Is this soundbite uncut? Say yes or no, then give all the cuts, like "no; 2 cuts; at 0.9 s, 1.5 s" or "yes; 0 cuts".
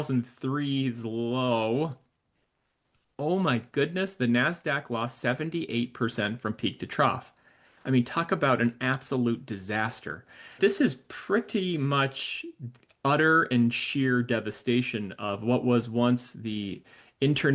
no; 1 cut; at 10.6 s